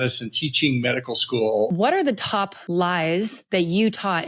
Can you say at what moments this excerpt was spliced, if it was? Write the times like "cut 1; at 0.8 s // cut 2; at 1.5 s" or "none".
cut 1; at 1.7 s // cut 2; at 2.6 s // cut 3; at 3.4 s